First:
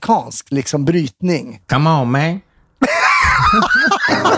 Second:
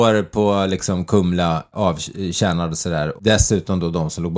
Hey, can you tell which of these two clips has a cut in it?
first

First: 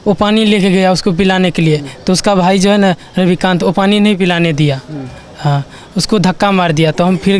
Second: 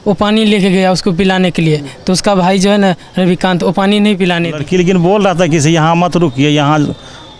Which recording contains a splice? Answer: second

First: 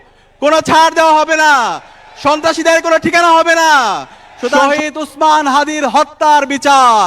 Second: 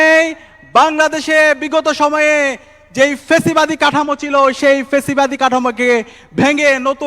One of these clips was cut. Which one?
first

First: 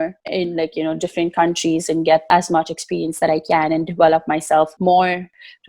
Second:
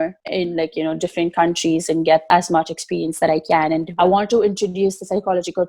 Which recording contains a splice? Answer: second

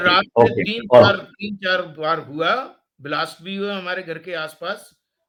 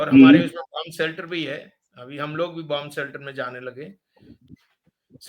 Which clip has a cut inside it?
second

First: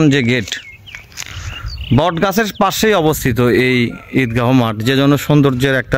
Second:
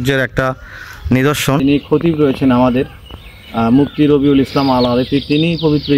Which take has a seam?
second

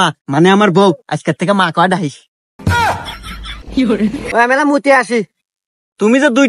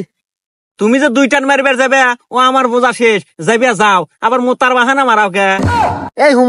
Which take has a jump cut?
first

